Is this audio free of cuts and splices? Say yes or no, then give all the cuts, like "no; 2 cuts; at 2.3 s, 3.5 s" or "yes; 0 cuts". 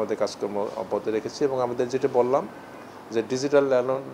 yes; 0 cuts